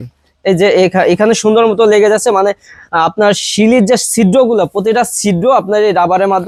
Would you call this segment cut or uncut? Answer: uncut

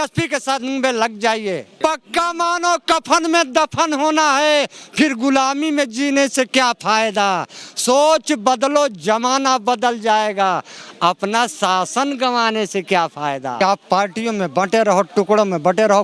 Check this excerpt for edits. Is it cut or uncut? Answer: cut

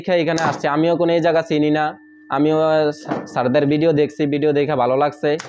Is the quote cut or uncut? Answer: uncut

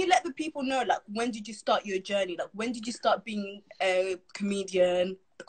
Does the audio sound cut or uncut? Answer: uncut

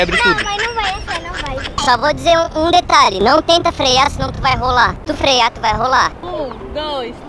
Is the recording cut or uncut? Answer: cut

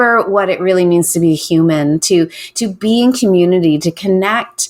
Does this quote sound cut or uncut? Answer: uncut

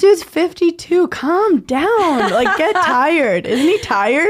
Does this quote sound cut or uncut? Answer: uncut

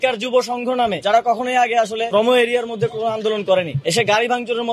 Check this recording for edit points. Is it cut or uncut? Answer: cut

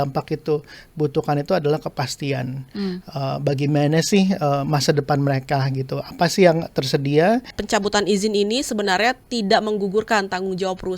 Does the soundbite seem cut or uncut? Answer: cut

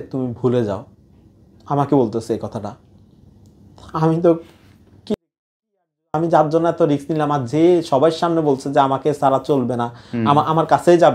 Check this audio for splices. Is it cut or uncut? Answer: uncut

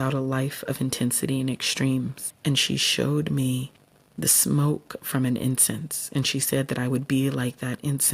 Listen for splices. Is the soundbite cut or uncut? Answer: cut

